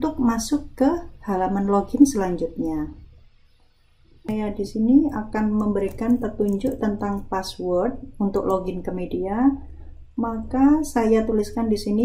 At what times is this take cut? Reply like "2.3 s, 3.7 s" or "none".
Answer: 4.3 s